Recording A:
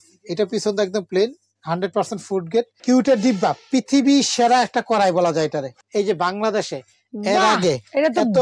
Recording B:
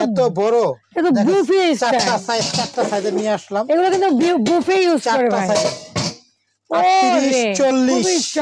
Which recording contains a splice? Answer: A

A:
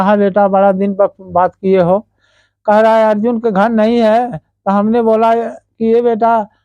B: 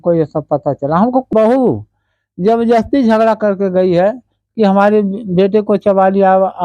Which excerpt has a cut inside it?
B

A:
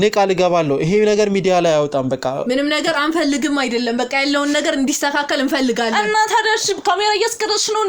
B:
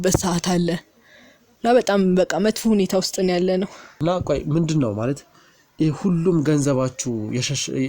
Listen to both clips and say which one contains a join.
B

